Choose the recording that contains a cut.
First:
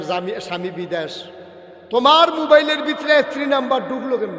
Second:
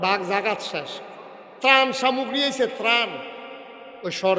second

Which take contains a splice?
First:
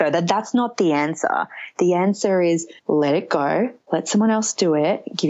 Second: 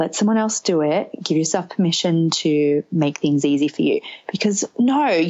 first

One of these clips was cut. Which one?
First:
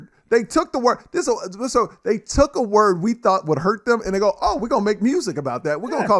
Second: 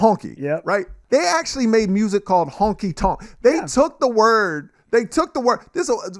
second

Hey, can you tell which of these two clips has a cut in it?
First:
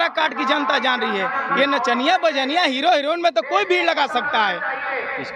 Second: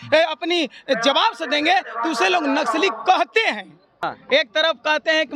second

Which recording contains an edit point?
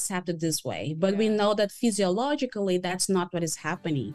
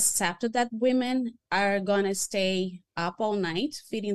second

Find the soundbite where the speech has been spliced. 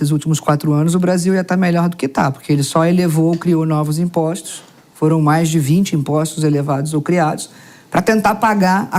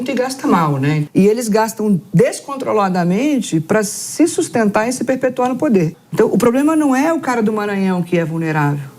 second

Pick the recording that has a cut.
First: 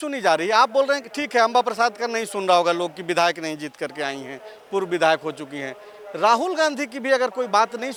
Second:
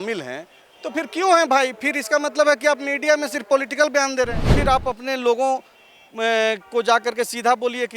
second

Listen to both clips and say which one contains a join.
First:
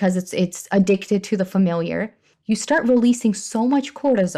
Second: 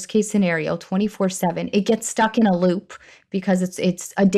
first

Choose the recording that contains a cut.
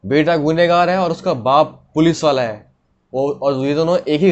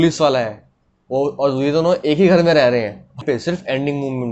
second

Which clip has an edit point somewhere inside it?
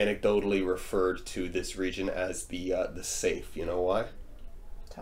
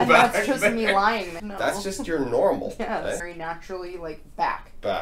second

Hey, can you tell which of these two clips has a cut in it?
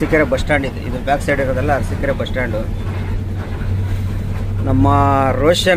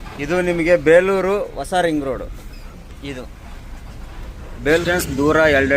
second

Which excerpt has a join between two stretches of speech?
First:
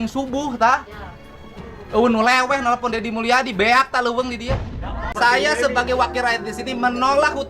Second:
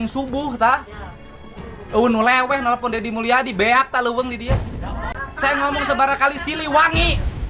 first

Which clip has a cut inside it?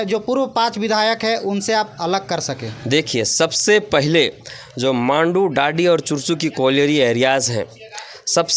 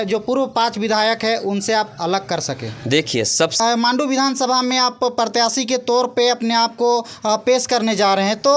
second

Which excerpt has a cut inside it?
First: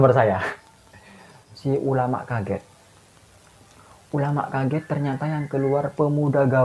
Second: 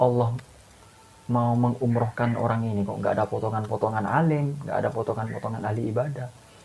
first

